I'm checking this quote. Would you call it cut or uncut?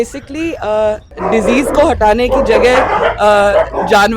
cut